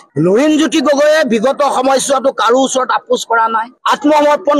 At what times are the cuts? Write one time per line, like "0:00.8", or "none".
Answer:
none

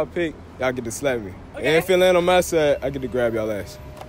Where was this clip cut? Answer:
0:01.4

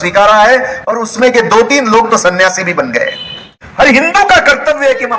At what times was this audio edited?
0:03.6

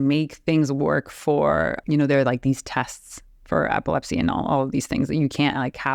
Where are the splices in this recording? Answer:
0:01.8

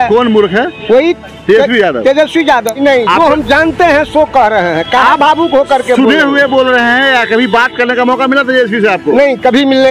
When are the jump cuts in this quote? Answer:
0:02.8

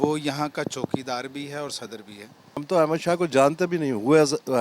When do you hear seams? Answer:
0:02.6

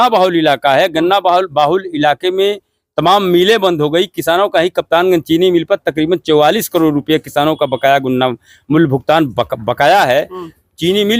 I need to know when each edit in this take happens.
none

